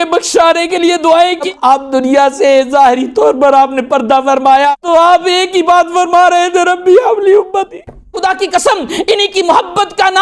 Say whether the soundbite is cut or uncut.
cut